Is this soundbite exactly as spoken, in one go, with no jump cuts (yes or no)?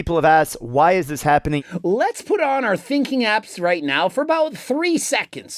no